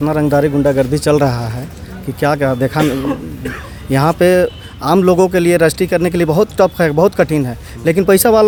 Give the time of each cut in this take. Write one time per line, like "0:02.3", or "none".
none